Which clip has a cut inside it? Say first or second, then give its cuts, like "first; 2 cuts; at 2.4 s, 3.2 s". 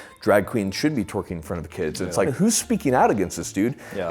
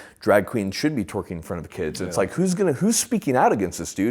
first; 1 cut; at 2.3 s